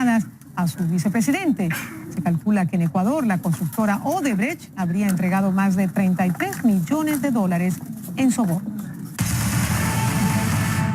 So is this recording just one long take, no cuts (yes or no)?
yes